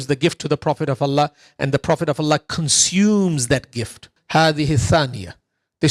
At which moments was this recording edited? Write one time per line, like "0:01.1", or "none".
0:04.1

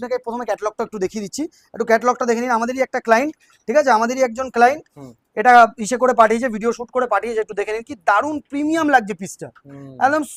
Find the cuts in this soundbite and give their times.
none

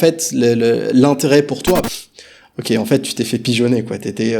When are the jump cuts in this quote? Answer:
0:01.9

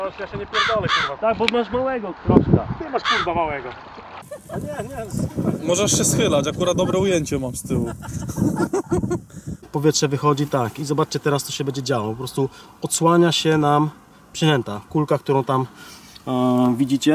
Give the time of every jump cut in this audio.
0:04.2
0:09.6

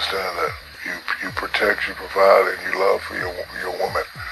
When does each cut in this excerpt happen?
none

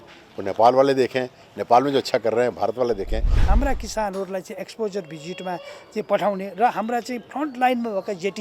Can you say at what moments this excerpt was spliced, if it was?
0:03.4

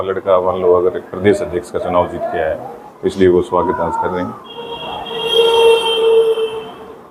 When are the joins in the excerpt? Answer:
none

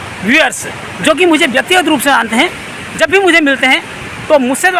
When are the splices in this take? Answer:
none

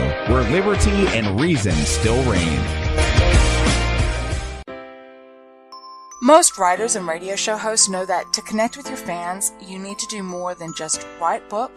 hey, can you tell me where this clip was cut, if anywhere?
0:04.6

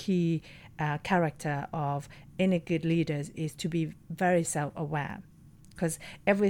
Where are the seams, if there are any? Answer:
none

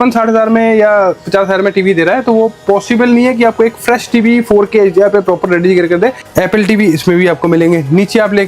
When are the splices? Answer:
0:06.3

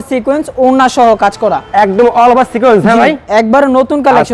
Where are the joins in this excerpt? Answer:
none

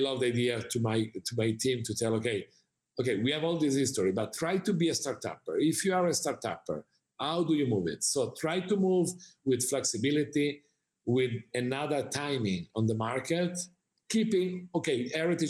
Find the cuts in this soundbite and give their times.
none

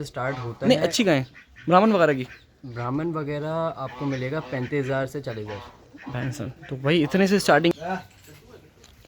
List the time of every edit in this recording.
0:07.7

